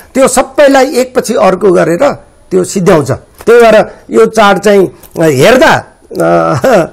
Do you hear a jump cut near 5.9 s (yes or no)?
no